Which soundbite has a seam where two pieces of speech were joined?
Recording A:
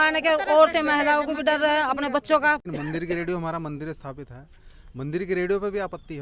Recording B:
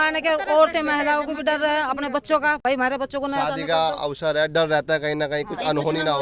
A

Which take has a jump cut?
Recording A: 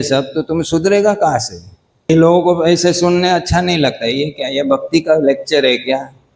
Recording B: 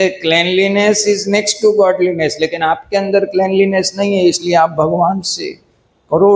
A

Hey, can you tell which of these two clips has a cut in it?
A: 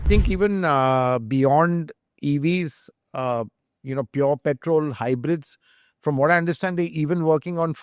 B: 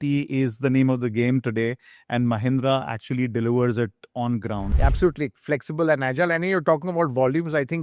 B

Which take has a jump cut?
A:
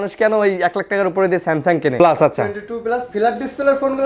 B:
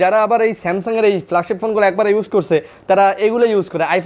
A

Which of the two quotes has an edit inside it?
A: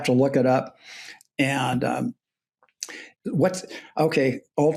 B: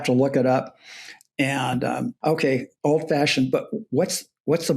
B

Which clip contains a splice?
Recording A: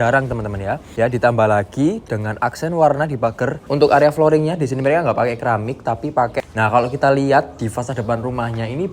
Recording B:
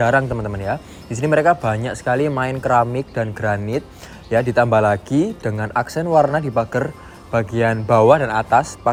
A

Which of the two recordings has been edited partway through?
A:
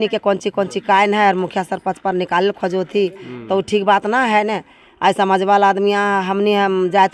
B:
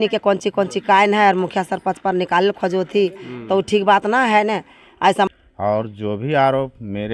B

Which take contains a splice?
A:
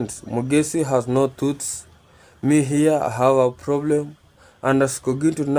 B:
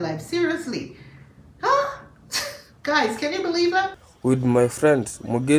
B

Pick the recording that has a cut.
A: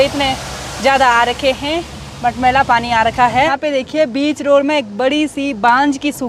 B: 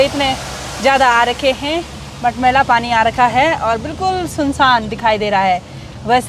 A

